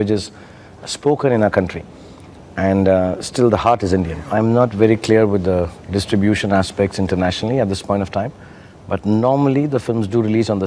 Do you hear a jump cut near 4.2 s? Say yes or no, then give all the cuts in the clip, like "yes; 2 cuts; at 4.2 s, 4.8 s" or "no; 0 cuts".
yes; 1 cut; at 4.2 s